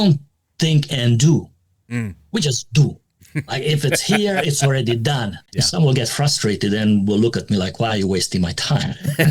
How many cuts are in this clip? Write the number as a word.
one